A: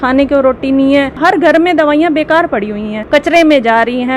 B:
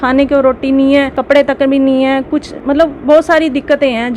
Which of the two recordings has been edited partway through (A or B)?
A